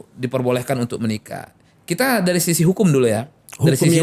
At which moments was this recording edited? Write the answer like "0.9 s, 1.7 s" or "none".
none